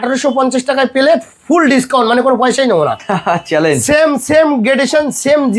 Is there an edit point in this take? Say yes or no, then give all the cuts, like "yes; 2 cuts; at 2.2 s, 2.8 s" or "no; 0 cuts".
no; 0 cuts